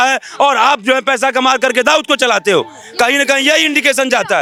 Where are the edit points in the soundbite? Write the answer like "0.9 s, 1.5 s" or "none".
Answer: none